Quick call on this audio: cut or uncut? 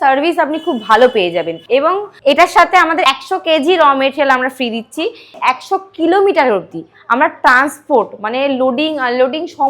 cut